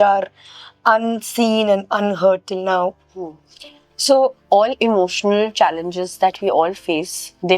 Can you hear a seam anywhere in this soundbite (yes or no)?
yes